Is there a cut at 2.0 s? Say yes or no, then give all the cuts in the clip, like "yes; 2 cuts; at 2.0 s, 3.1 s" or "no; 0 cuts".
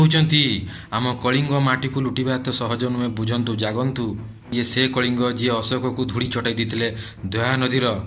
no; 1 cut; at 4.5 s